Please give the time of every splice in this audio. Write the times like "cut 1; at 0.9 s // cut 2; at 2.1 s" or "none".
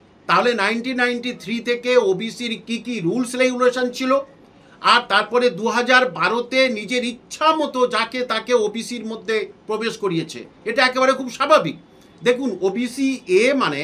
none